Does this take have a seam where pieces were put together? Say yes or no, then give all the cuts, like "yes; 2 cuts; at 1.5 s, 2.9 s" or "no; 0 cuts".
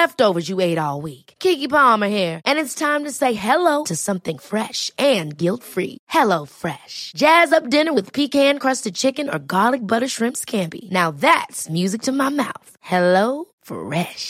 no; 0 cuts